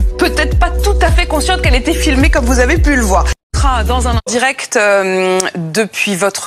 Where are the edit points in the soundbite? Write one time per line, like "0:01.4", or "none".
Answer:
none